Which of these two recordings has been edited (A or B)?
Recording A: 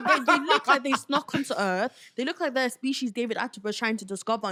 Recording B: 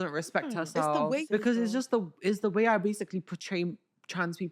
B